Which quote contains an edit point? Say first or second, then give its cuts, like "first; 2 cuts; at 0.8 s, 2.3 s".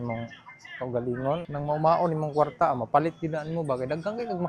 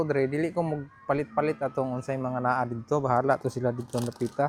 first; 1 cut; at 1.5 s